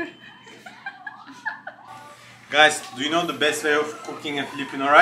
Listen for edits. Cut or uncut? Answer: cut